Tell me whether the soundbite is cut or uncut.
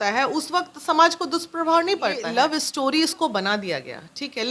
cut